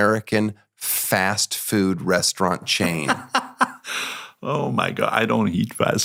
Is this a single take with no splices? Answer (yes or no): yes